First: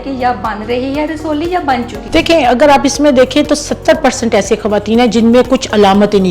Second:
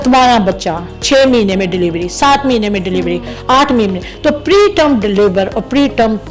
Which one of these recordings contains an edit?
first; 1 cut; at 2.0 s

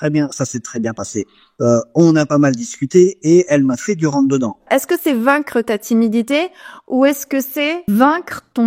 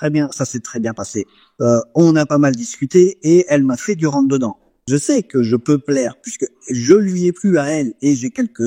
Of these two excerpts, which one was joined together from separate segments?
first; 1 cut; at 4.7 s

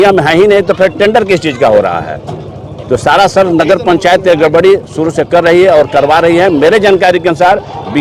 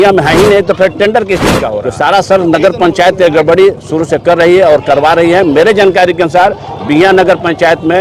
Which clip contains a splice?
second; 1 cut; at 1.6 s

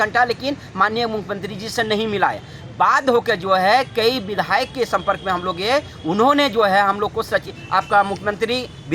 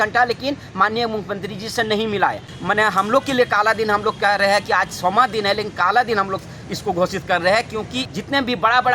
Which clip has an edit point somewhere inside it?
second; 2 cuts; at 2.5 s, 8.0 s

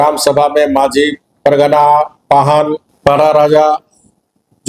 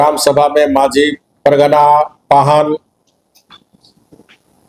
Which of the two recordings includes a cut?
first; 1 cut; at 2.9 s

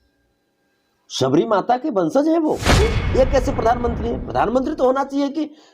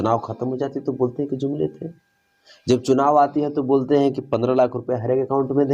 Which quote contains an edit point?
first; 1 cut; at 2.8 s

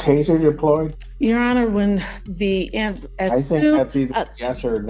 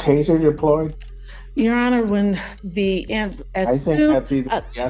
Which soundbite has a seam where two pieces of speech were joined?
first; 1 cut; at 1.0 s

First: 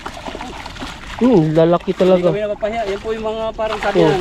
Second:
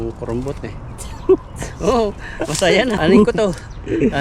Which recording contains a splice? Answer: second; 1 cut; at 3.0 s

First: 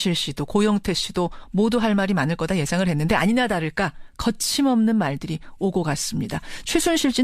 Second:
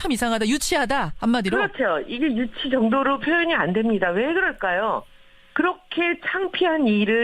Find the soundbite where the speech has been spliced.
second; 1 cut; at 3.2 s

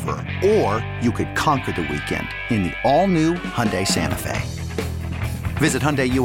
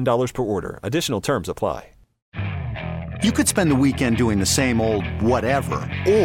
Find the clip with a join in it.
second; 1 cut; at 2.2 s

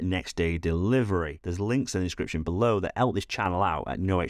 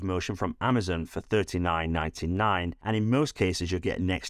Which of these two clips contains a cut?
first; 1 cut; at 1.4 s

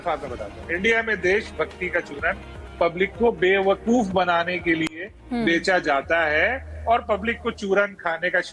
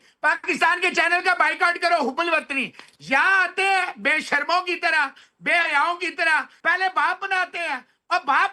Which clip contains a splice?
second; 1 cut; at 6.5 s

